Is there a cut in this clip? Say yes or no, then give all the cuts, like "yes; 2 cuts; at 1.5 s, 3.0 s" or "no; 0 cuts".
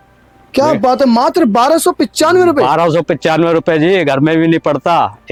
no; 0 cuts